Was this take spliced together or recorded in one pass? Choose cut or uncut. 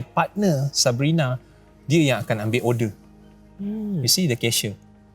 uncut